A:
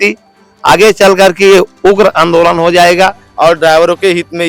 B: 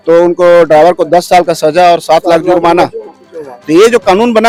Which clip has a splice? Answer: A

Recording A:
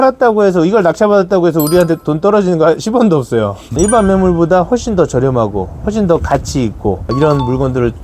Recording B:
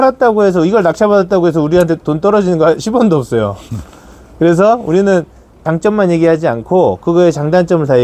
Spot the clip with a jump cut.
A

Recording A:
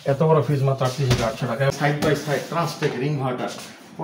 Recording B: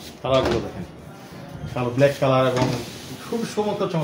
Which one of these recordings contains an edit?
A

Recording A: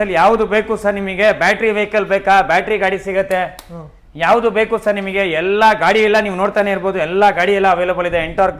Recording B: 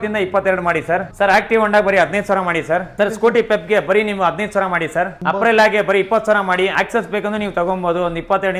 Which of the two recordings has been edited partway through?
B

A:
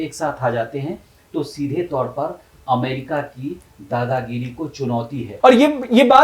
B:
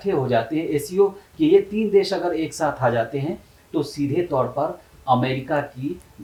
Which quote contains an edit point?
A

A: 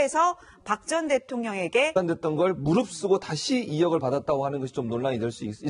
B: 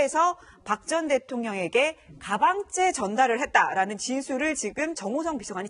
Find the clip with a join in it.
B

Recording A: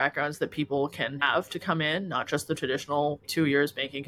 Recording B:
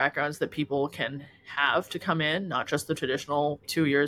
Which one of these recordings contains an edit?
A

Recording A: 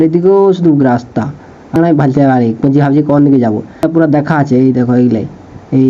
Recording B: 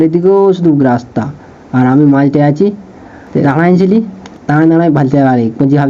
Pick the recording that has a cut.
A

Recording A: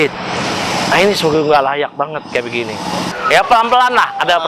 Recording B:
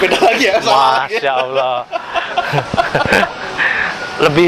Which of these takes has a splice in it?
A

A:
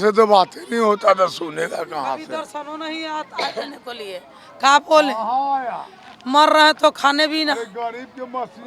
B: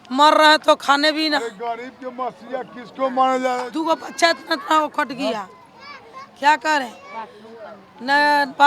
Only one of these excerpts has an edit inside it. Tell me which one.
B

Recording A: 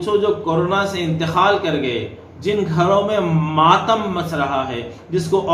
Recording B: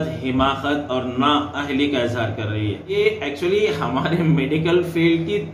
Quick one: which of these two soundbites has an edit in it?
B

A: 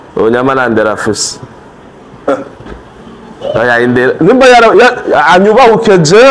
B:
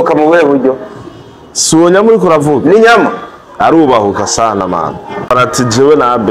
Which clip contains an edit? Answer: B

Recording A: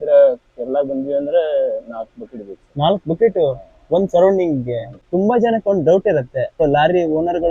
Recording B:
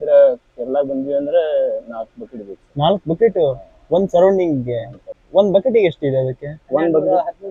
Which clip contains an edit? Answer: A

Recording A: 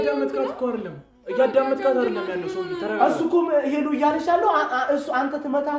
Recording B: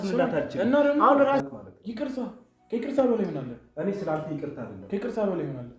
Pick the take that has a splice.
B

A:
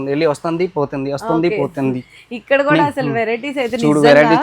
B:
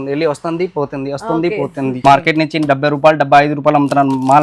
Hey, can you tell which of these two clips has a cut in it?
B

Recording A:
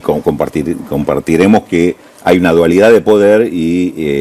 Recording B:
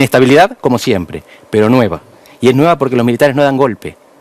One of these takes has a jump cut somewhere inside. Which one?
B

